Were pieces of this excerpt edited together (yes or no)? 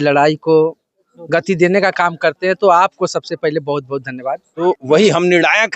yes